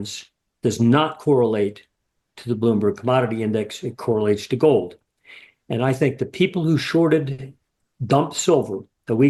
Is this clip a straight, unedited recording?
yes; 0 cuts

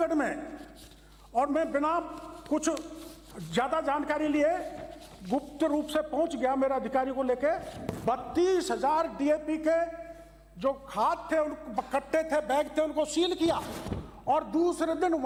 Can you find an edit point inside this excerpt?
no; 0 cuts

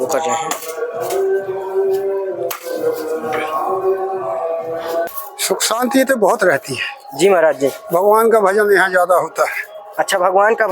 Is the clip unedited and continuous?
no; 1 cut; at 5.1 s

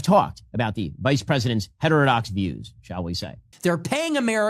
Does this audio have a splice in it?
yes; 1 cut; at 3.5 s

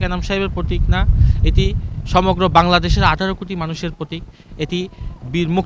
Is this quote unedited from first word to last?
yes; 0 cuts

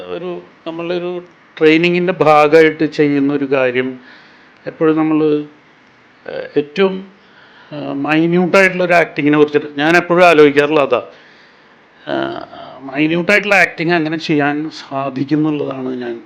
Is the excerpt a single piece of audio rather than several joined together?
yes; 0 cuts

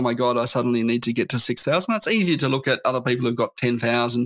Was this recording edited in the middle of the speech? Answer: no; 0 cuts

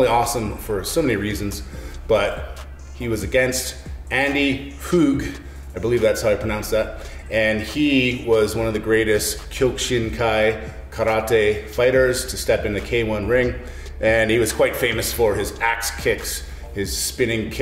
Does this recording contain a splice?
no; 0 cuts

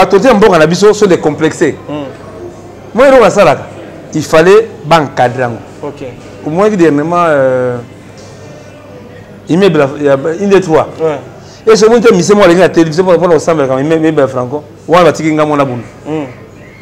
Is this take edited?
no; 0 cuts

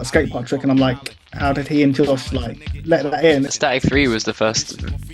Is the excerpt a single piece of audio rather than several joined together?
no; 1 cut; at 3.5 s

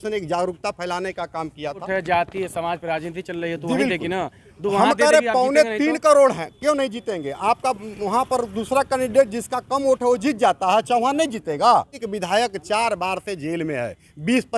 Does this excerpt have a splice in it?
yes; 2 cuts; at 1.8 s, 12.1 s

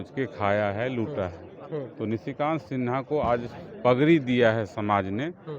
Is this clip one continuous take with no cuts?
no; 1 cut; at 1.9 s

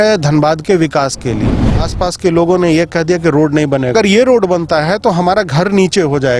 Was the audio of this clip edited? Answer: yes; 2 cuts; at 1.8 s, 3.9 s

